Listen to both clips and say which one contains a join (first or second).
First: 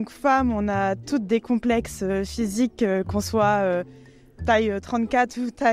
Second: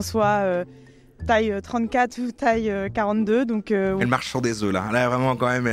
second